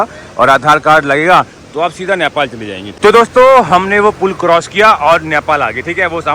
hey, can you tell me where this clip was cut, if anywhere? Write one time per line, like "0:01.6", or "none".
0:02.8